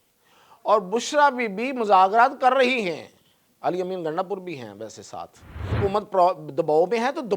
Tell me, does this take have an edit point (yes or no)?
yes